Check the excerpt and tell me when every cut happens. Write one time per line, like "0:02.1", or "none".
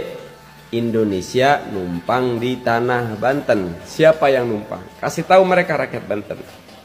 0:03.8